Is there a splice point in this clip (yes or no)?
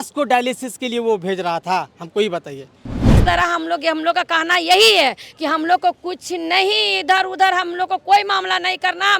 yes